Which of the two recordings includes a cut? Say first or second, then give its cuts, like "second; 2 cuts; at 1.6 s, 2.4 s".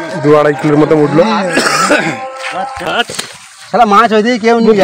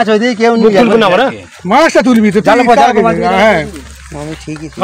first; 1 cut; at 2.9 s